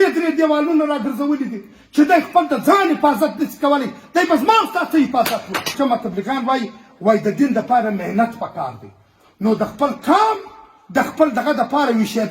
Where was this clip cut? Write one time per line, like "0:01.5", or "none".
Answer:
0:05.7

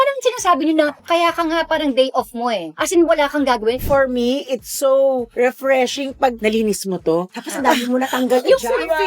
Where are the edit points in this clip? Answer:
0:02.7
0:03.8
0:06.4

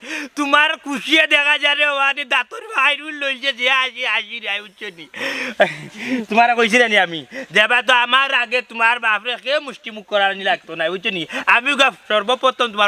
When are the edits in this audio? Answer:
none

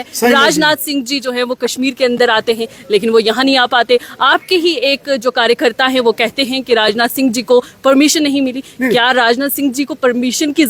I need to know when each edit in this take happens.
none

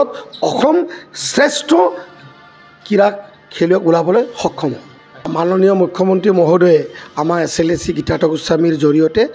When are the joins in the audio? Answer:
0:05.3

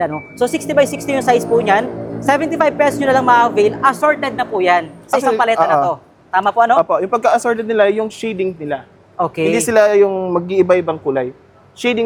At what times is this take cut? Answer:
none

